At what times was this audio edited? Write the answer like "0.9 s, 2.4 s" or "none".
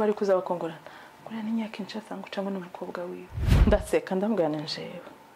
3.5 s